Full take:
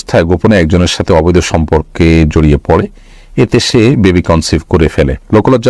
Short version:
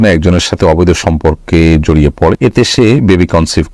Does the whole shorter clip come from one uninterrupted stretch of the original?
no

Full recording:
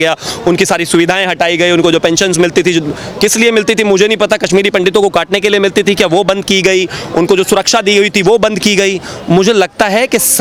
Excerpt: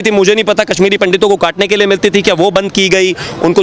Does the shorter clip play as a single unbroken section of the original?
yes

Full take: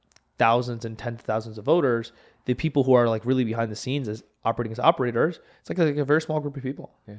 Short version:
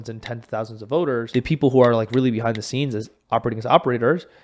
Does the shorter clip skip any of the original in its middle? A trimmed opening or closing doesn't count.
yes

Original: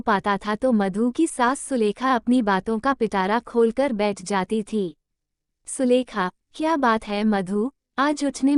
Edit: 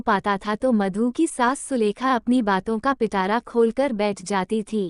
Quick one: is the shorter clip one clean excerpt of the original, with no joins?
yes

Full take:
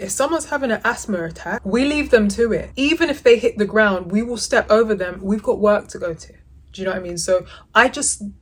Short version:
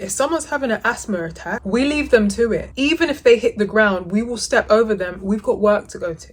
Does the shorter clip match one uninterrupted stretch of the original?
yes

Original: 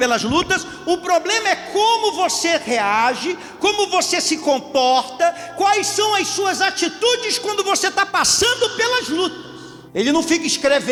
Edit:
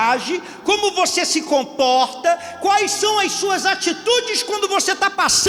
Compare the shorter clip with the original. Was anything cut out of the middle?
no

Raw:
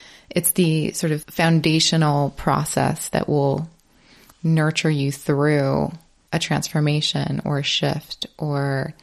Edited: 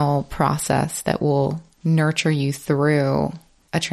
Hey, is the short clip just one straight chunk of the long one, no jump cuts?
no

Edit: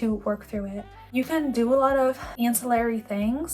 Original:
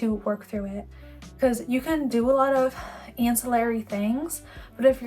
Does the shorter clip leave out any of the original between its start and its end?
yes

